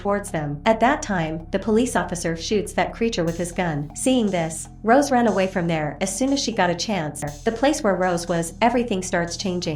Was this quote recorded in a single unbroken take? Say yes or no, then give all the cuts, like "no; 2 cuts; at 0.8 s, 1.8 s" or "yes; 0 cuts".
no; 1 cut; at 7.3 s